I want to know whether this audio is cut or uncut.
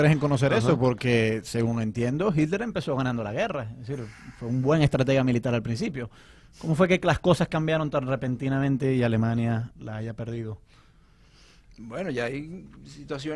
uncut